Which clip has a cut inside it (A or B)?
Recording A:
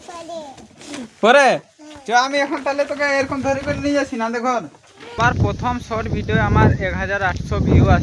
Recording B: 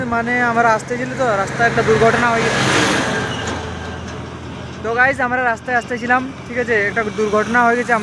A